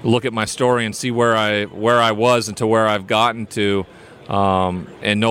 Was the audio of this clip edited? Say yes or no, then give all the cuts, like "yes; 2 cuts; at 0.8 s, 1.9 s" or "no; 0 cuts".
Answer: no; 0 cuts